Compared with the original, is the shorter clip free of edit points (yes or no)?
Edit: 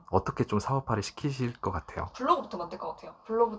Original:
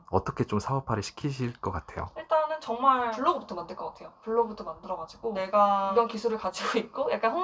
no